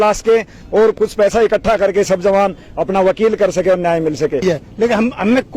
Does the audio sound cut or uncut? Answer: cut